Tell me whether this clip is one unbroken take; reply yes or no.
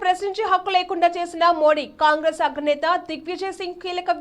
yes